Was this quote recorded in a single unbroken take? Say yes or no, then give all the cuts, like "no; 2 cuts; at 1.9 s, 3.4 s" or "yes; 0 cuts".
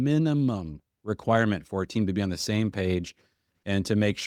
yes; 0 cuts